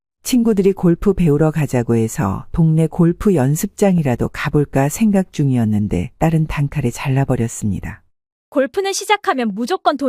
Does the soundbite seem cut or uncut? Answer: uncut